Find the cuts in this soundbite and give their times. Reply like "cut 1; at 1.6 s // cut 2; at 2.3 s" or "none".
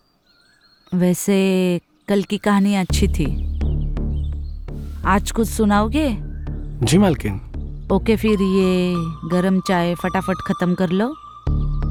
none